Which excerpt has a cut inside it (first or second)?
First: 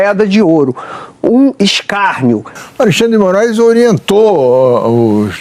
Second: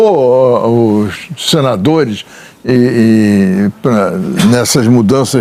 first